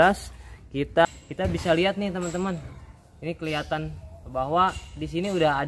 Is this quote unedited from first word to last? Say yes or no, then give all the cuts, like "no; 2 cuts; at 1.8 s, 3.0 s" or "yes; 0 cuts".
no; 1 cut; at 1.1 s